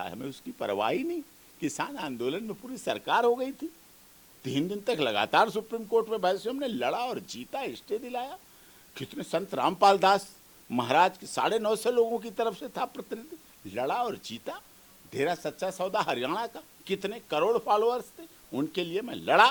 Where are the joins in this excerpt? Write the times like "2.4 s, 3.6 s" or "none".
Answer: none